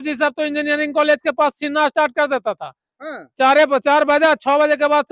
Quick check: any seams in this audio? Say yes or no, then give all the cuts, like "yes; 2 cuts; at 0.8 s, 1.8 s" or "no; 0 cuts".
no; 0 cuts